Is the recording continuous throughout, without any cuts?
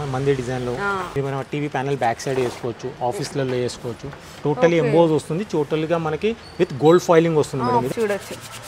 no; 2 cuts; at 1.1 s, 7.9 s

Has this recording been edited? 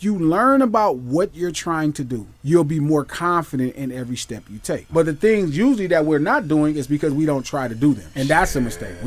yes; 3 cuts; at 2.3 s, 4.9 s, 8.1 s

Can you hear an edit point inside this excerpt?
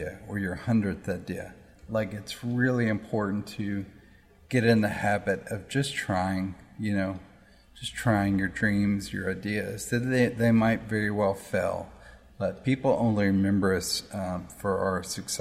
no; 0 cuts

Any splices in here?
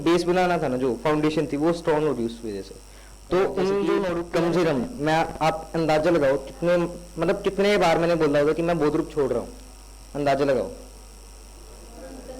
yes; 1 cut; at 4.2 s

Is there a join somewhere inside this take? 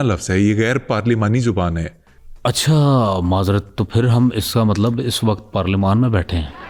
no; 0 cuts

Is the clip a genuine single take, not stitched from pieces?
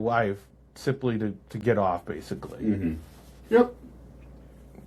yes; 0 cuts

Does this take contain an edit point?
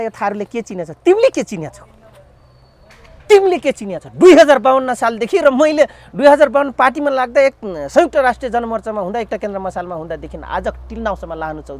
no; 0 cuts

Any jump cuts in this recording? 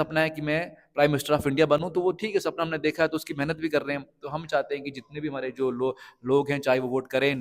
no; 0 cuts

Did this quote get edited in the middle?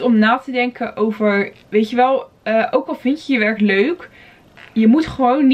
no; 0 cuts

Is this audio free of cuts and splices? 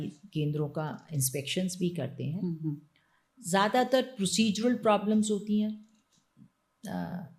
yes; 0 cuts

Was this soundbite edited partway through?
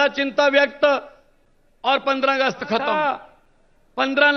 yes; 1 cut; at 2.9 s

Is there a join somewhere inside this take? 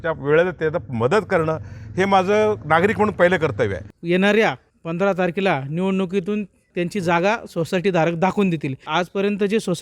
yes; 3 cuts; at 3.9 s, 6.7 s, 8.8 s

